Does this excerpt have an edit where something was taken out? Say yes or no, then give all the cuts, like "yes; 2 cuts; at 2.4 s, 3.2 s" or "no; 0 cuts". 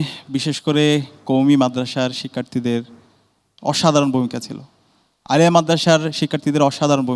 no; 0 cuts